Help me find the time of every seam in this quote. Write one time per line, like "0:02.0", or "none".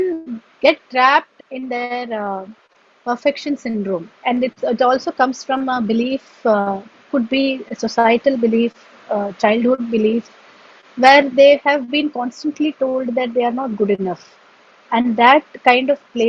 0:01.3
0:04.1

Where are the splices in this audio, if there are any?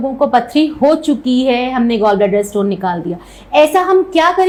none

